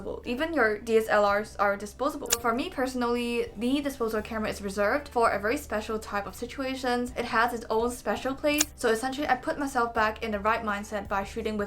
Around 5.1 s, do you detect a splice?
yes; 4 cuts; at 2.4 s, 5.1 s, 7.1 s, 8.6 s

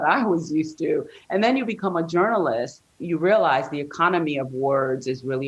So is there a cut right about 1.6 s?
no; 1 cut; at 2.9 s

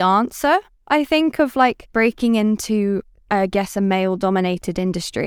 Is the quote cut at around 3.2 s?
no; 1 cut; at 1.8 s

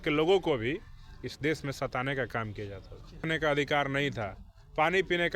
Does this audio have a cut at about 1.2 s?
no; 1 cut; at 3.2 s

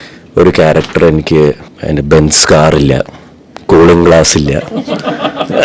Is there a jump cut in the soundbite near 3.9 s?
no; 1 cut; at 1.7 s

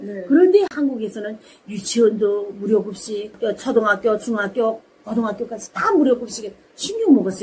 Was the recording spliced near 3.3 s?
no; 0 cuts

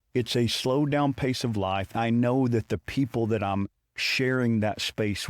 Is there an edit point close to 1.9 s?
yes; 1 cut; at 1.9 s

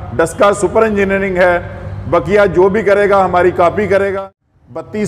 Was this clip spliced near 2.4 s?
no; 1 cut; at 4.1 s

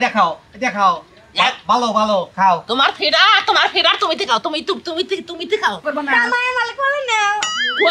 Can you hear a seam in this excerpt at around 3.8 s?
no; 1 cut; at 5.8 s

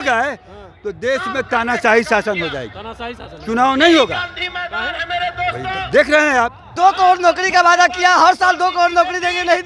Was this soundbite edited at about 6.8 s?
yes; 1 cut; at 6.8 s

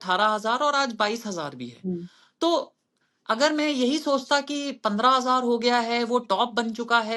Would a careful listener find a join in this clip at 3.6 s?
no; 0 cuts

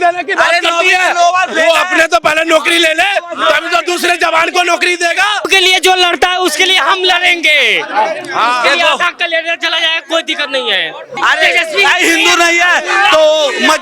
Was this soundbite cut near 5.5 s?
yes; 2 cuts; at 5.5 s, 11.1 s

